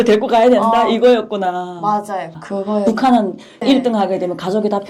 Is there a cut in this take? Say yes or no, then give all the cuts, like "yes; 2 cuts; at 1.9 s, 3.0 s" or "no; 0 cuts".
yes; 2 cuts; at 2.4 s, 3.6 s